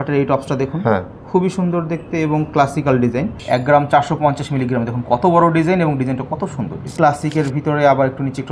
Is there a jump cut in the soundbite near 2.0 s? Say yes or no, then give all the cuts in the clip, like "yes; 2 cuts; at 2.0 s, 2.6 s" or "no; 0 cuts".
no; 2 cuts; at 3.4 s, 6.8 s